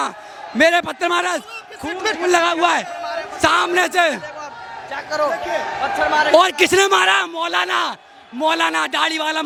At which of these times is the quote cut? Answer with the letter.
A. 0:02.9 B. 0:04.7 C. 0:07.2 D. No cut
D